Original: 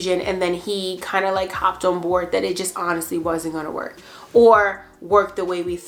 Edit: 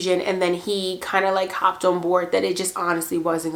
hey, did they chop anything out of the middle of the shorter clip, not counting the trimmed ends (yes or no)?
no